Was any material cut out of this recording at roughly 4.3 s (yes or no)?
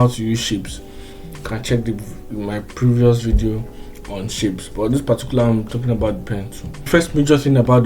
no